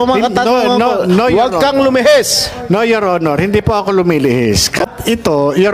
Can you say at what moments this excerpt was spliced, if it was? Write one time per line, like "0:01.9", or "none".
0:04.7